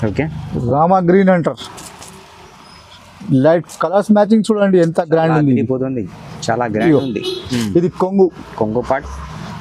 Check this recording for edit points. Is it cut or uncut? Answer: uncut